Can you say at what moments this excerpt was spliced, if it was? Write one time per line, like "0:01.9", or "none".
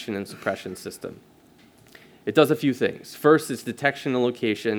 none